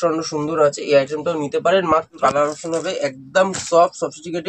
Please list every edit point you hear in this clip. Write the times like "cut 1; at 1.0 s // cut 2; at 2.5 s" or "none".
cut 1; at 2.1 s